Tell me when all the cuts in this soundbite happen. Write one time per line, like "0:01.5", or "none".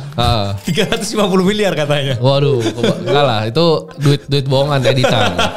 none

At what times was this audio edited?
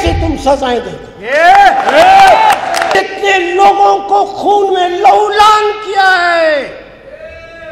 0:02.9

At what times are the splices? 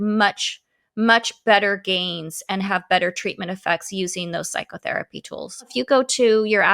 0:05.7

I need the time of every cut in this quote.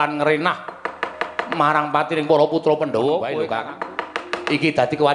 0:03.4

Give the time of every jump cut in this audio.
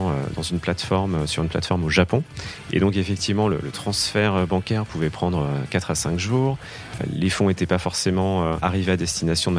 0:07.0
0:08.6

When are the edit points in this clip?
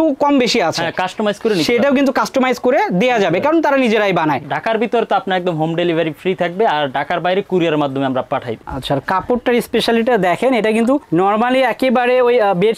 0:04.5
0:08.6

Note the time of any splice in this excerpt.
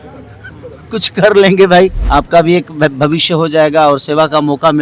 0:02.0

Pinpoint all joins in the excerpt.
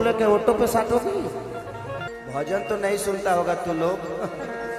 0:02.1

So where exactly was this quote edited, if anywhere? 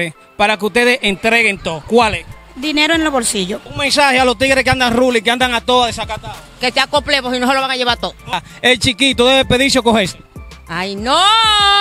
0:03.7
0:08.4

